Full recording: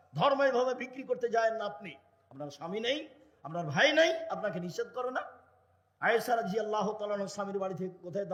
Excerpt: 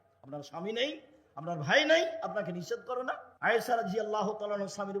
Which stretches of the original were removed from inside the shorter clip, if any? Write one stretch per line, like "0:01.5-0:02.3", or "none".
0:05.3-0:05.8